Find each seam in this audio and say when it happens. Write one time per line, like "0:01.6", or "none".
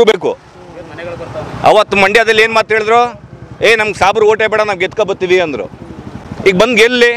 none